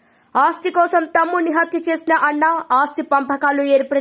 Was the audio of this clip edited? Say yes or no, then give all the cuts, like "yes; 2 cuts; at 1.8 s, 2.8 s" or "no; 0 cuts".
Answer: no; 0 cuts